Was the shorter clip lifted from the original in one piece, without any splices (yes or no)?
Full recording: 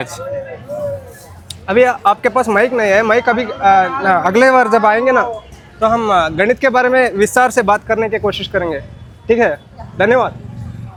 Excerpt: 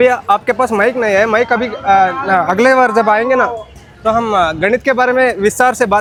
yes